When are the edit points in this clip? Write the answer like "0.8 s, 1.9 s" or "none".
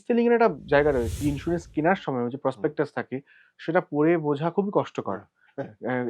1.2 s